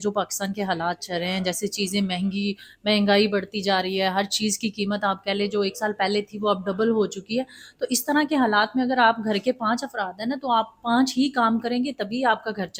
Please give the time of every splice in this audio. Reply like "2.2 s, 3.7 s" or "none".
none